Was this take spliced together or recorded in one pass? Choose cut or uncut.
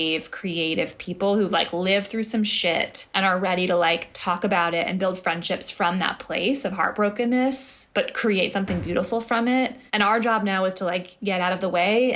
uncut